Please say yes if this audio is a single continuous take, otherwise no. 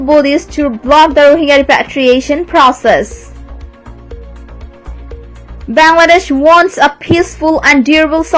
yes